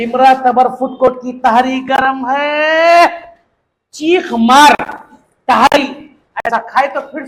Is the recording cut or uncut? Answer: uncut